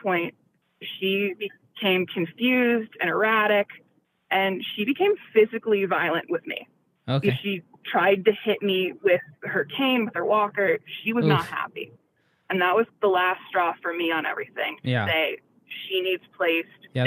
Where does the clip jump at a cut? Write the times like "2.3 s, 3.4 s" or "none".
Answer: none

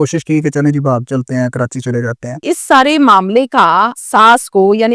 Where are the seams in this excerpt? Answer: 2.4 s, 4.0 s

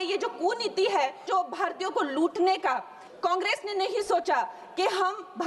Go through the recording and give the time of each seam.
1.2 s, 3.0 s

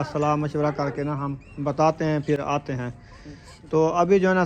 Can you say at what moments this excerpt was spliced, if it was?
none

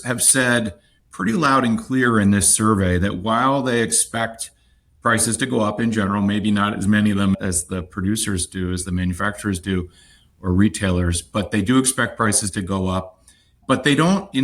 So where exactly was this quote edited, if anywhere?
none

